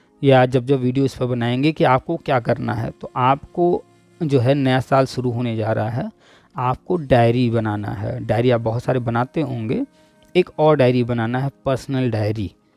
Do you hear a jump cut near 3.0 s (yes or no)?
no